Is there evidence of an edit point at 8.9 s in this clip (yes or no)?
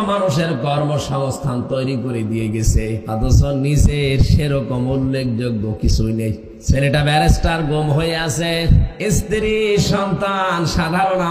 yes